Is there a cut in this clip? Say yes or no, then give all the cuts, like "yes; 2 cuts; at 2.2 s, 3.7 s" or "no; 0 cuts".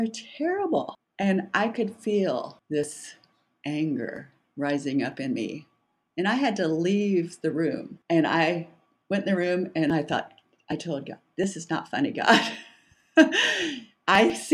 yes; 3 cuts; at 1.0 s, 2.6 s, 7.9 s